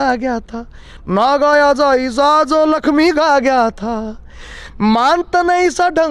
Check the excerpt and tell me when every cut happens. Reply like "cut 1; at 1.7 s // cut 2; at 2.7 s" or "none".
none